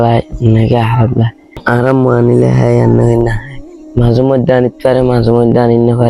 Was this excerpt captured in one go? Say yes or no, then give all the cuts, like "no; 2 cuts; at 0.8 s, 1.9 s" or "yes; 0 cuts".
yes; 0 cuts